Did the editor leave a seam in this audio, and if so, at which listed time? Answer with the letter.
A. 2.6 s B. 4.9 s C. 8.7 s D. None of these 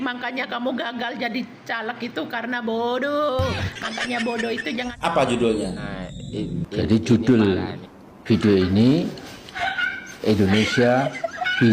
B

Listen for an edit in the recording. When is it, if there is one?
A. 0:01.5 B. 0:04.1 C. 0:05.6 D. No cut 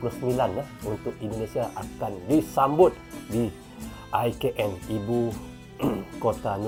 D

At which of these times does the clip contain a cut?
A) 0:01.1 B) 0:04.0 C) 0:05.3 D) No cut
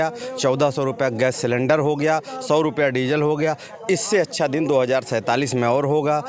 D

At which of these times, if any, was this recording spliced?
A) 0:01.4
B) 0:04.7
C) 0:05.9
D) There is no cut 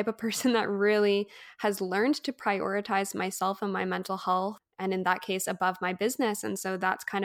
B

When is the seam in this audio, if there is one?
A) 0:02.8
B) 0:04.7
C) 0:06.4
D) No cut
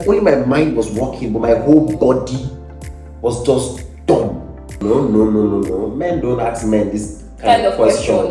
B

